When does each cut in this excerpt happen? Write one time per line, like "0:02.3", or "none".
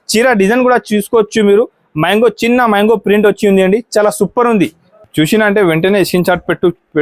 0:04.9